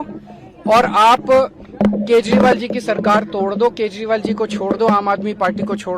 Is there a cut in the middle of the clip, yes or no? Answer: no